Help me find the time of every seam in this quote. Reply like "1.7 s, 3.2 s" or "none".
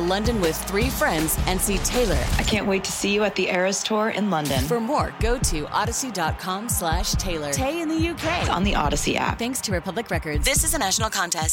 none